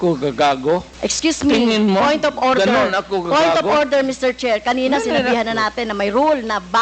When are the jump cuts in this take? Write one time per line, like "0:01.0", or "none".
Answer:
0:00.9